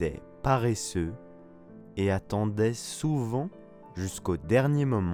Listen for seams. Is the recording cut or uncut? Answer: uncut